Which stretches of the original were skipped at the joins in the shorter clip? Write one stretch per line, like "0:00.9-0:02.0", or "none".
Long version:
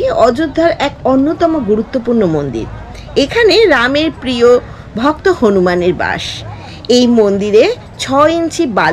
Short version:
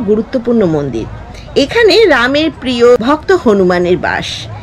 0:04.6-0:05.0